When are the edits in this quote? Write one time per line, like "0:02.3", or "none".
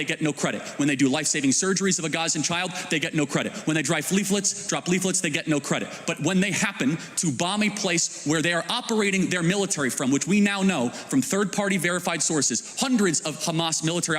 none